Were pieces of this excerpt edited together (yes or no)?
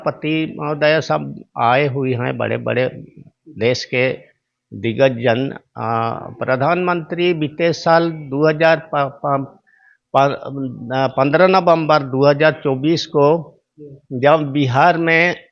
no